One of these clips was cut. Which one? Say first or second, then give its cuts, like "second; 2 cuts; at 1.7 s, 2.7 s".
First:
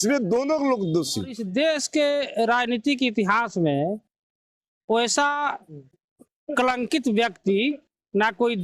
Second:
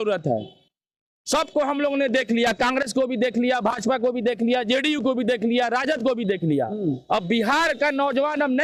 first; 1 cut; at 1.4 s